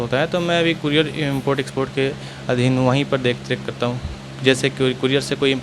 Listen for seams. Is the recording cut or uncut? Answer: uncut